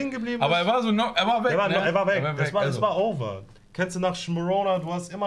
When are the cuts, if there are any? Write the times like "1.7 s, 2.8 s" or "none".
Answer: 3.6 s